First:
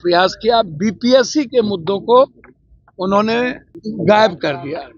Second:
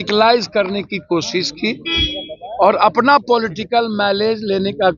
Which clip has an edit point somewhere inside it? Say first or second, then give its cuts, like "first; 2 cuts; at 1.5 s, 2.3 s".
first; 1 cut; at 3.7 s